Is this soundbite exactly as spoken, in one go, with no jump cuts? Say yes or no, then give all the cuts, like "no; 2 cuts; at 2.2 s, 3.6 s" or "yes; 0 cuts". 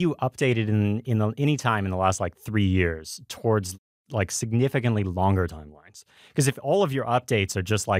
no; 1 cut; at 4.0 s